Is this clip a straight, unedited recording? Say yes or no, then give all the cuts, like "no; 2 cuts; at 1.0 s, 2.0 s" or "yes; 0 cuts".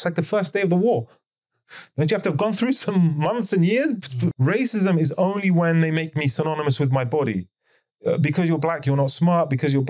no; 1 cut; at 4.4 s